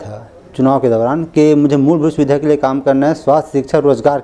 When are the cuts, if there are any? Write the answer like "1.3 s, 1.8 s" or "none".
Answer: none